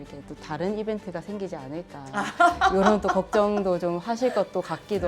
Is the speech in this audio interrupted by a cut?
no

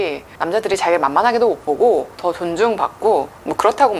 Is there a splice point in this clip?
no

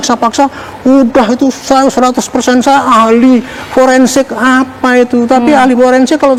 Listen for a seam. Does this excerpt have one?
no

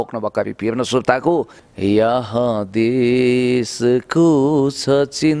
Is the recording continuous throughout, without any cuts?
no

